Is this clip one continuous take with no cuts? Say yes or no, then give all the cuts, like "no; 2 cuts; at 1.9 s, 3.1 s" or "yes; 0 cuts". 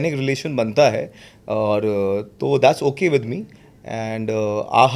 yes; 0 cuts